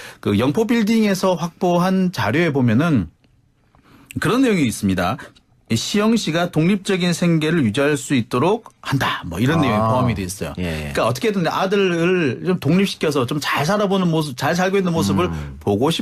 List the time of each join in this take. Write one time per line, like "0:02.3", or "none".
0:01.2